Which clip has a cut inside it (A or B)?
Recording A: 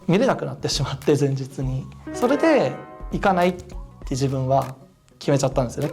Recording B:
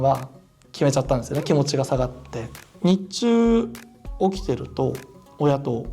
B